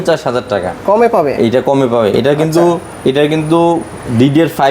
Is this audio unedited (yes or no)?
yes